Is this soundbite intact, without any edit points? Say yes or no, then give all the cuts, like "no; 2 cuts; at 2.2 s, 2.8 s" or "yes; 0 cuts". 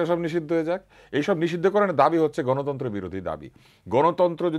yes; 0 cuts